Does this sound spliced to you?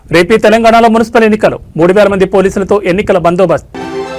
no; 0 cuts

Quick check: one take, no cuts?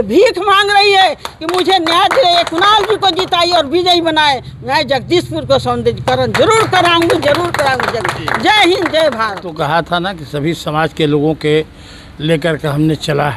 yes; 0 cuts

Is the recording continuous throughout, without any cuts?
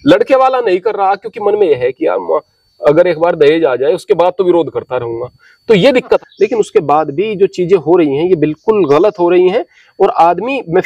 no; 1 cut; at 6.2 s

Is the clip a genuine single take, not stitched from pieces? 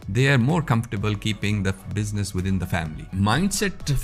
no; 1 cut; at 3.1 s

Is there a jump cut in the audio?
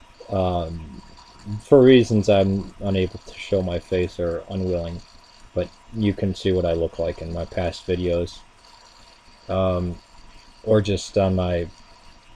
yes; 1 cut; at 9.7 s

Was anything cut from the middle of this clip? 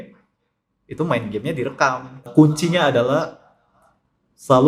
yes; 1 cut; at 2.2 s

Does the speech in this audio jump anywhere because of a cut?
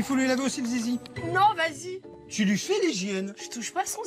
yes; 1 cut; at 1.2 s

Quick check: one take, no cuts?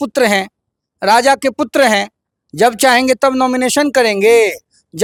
yes; 0 cuts

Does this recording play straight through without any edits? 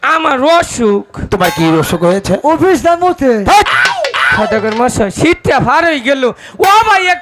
no; 1 cut; at 4.3 s

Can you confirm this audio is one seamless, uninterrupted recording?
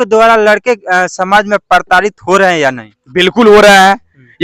yes; 0 cuts

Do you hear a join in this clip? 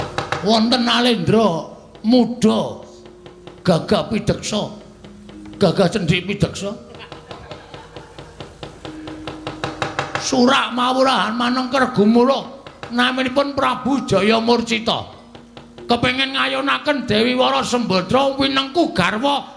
no; 0 cuts

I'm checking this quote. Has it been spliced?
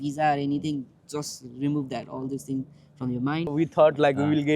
yes; 1 cut; at 3.5 s

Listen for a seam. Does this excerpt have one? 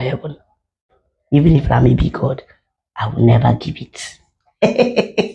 yes; 1 cut; at 0.9 s

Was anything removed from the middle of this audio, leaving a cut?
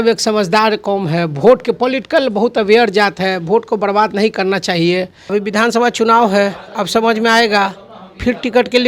yes; 1 cut; at 5.3 s

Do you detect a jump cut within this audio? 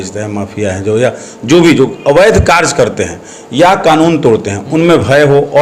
no; 0 cuts

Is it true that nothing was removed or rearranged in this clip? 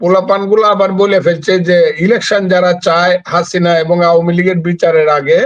yes; 0 cuts

